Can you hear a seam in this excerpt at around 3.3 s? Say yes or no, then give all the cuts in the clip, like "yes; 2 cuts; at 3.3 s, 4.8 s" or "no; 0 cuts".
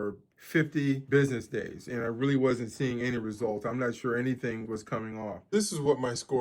no; 2 cuts; at 1.0 s, 5.5 s